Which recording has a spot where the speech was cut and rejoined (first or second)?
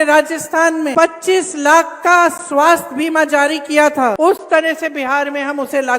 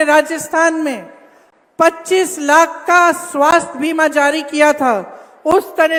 first